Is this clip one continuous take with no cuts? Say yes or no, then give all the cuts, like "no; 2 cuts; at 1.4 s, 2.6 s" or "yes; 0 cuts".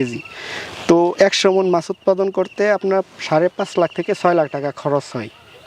yes; 0 cuts